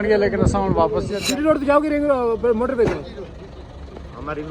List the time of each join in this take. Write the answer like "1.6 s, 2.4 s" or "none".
1.2 s